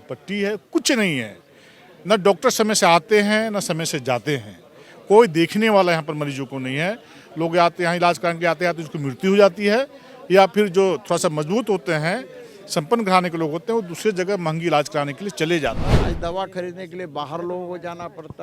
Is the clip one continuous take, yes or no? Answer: no